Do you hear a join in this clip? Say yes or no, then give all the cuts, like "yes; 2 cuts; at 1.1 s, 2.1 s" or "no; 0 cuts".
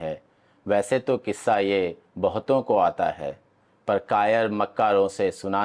no; 0 cuts